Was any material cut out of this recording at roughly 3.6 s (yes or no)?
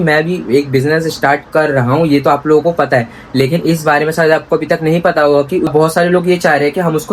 no